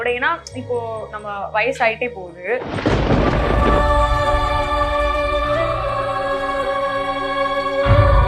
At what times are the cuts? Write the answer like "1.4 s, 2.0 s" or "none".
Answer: none